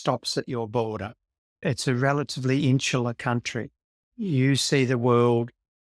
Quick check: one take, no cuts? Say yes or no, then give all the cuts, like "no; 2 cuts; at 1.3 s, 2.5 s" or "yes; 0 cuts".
no; 1 cut; at 4.1 s